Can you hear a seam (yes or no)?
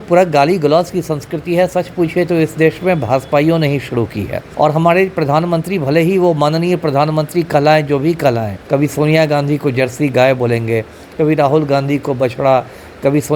yes